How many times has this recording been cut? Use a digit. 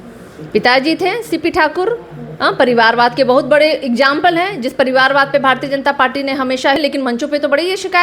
1